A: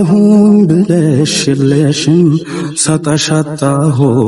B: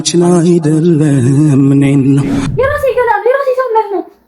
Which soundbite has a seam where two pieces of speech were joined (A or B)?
B